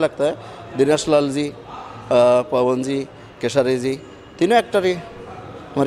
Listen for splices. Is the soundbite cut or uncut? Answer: uncut